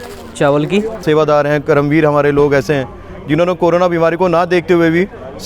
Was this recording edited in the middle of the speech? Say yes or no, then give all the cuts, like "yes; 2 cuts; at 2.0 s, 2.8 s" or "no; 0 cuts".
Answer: yes; 1 cut; at 1.0 s